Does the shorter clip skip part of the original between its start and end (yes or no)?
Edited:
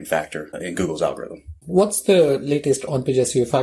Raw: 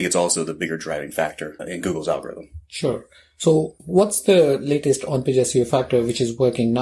yes